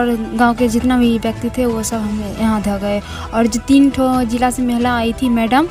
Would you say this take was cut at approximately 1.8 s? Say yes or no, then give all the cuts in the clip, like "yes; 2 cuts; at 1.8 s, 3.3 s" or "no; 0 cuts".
no; 0 cuts